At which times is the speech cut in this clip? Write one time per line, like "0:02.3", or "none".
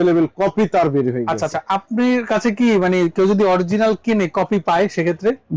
none